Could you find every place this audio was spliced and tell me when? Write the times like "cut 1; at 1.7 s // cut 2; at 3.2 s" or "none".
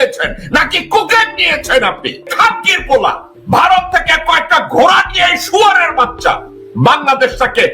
cut 1; at 2.3 s // cut 2; at 3.3 s